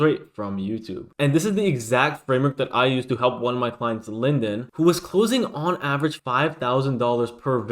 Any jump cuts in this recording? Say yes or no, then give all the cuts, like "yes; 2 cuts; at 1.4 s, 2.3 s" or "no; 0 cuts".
yes; 1 cut; at 1.0 s